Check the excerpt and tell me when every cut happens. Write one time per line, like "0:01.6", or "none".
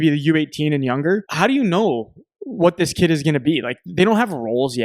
0:01.3